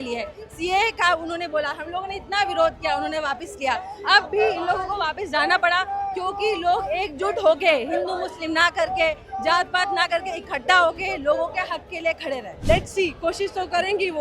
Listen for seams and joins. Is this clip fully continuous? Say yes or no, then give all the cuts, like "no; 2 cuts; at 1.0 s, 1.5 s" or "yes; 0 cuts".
no; 1 cut; at 12.5 s